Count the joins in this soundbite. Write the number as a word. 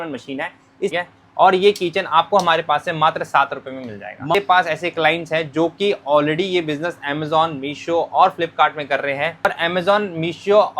three